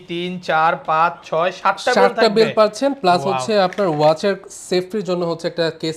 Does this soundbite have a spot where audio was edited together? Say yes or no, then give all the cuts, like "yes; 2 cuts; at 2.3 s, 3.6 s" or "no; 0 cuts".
no; 0 cuts